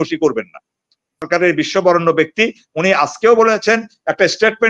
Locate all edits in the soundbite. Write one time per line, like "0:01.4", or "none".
0:01.3

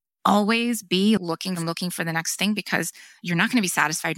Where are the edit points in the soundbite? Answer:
0:01.3
0:03.2

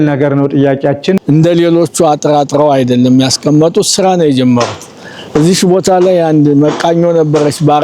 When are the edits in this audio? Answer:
0:01.2

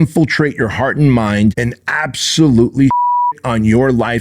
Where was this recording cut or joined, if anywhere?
0:01.7

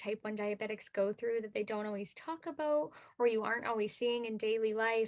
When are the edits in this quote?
none

